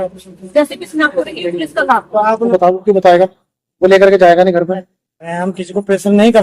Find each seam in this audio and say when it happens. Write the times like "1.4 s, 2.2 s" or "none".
2.5 s, 5.4 s